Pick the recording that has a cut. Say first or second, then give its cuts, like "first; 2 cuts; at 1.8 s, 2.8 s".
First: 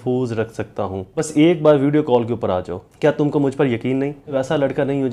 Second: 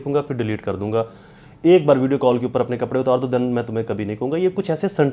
first; 3 cuts; at 1.3 s, 2.8 s, 4.3 s